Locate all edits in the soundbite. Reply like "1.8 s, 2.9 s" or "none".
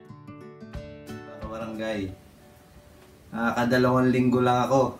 1.5 s